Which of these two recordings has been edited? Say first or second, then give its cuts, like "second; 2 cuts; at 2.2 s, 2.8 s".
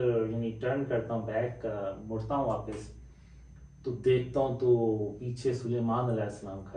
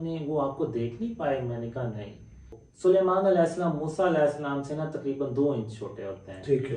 second; 1 cut; at 2.6 s